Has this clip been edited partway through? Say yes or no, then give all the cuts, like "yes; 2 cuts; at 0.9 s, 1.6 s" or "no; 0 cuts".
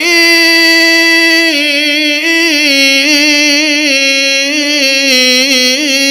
no; 0 cuts